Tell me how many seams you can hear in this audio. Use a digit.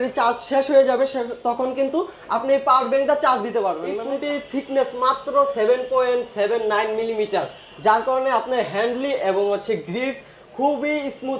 1